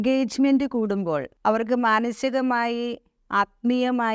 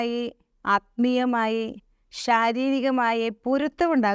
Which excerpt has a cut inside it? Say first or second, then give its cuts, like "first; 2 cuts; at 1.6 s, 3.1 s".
first; 1 cut; at 1.3 s